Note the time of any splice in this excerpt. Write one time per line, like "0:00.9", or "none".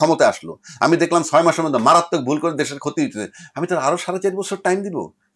none